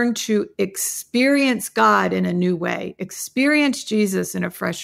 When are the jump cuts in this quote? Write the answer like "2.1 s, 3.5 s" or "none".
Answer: none